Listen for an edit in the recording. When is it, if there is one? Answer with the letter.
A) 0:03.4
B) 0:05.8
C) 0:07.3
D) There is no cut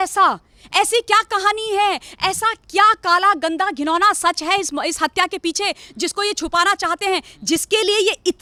D